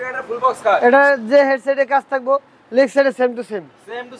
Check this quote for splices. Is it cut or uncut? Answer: uncut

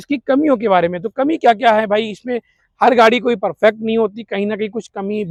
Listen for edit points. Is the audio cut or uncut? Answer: uncut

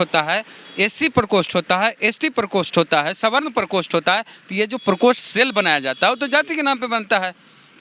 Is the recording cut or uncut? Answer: uncut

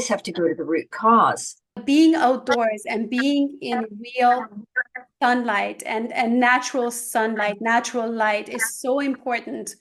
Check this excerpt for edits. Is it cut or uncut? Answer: cut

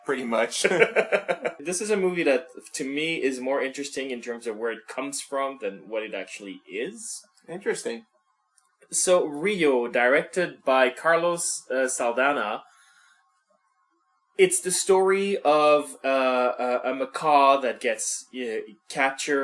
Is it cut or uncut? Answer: cut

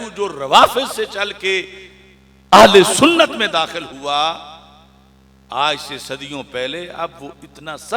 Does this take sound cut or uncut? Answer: uncut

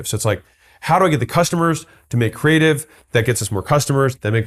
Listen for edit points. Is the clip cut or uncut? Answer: uncut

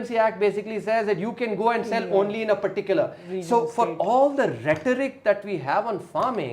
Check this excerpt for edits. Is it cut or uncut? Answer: uncut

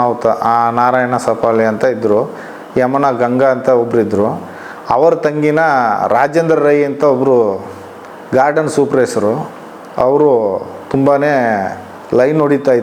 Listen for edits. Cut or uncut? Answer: uncut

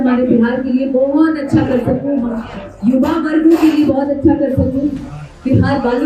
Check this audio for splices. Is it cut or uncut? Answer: uncut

